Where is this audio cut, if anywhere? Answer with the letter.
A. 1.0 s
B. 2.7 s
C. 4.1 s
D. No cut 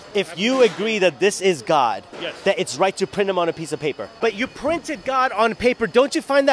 C